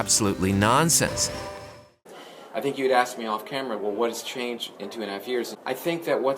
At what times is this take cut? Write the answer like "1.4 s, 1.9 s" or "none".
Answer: 1.9 s, 5.5 s